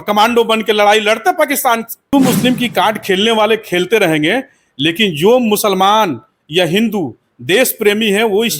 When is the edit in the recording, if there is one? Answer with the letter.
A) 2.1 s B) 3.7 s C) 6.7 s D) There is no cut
A